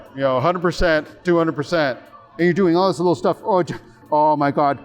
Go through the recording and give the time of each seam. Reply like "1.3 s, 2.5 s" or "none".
2.3 s, 3.8 s